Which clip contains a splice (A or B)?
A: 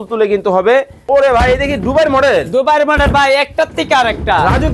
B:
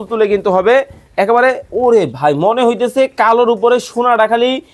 A